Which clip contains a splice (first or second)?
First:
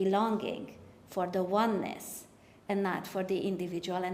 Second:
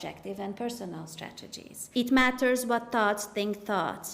second